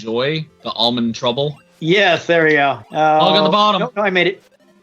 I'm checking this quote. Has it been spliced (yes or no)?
yes